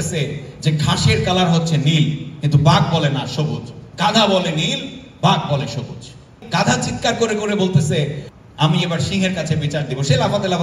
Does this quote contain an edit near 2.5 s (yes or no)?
no